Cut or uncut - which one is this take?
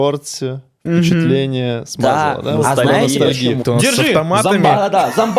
cut